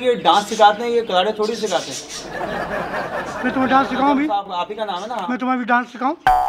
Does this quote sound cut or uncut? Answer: uncut